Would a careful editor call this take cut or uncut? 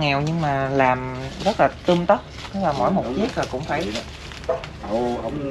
uncut